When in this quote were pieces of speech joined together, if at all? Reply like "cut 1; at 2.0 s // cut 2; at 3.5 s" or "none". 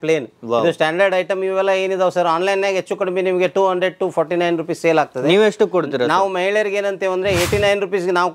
none